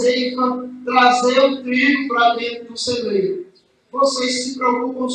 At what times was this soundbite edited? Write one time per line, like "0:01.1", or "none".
none

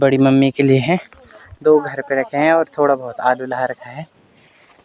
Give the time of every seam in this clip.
none

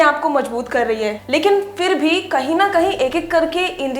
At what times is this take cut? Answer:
0:01.2

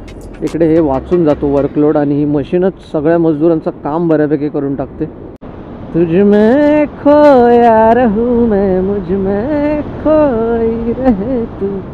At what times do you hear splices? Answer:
none

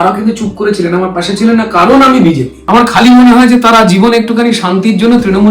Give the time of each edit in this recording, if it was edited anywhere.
0:02.5

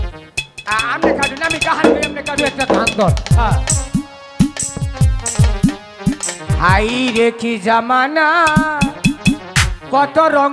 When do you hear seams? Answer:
none

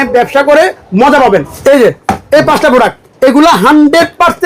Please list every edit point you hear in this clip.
0:01.5
0:03.0

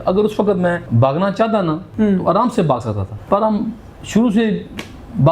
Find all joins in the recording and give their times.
0:00.9
0:01.8
0:03.1

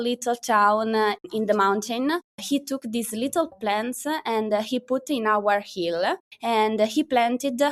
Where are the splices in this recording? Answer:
0:01.2
0:02.3
0:03.5
0:06.3

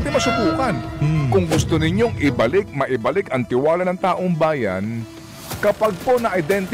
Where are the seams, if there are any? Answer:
none

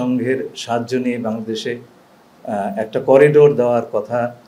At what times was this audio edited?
none

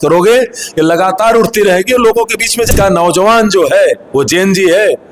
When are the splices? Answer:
0:02.7

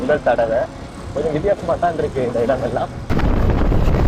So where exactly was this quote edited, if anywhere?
0:01.0
0:03.1

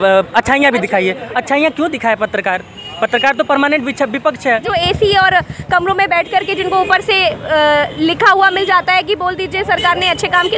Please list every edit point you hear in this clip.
0:04.7

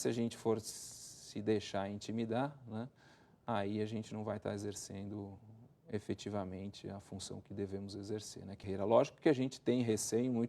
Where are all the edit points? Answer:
0:08.6

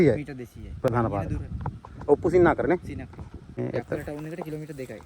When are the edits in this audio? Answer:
0:03.6

